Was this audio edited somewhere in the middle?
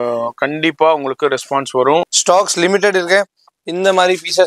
yes; 1 cut; at 2.1 s

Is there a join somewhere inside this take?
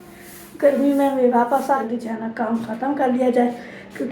yes; 1 cut; at 1.8 s

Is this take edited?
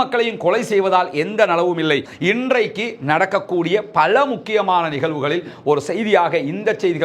yes; 1 cut; at 2.1 s

